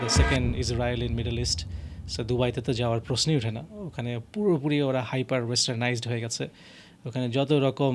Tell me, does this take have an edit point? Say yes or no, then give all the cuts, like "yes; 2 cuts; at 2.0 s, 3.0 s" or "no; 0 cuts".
no; 0 cuts